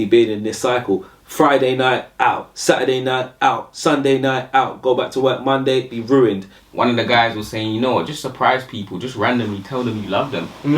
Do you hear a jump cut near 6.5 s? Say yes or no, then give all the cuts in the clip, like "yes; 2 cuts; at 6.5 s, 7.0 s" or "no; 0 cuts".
yes; 1 cut; at 6.5 s